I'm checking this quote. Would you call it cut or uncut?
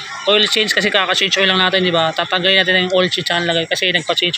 uncut